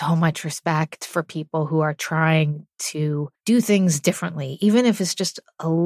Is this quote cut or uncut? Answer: cut